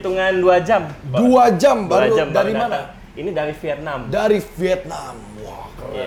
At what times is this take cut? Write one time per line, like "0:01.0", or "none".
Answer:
none